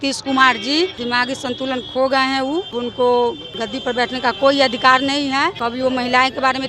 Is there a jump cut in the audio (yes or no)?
yes